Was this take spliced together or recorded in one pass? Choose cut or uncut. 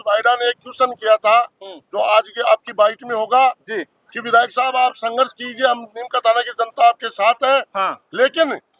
uncut